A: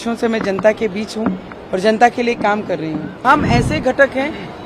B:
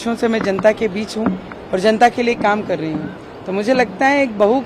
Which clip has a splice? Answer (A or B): A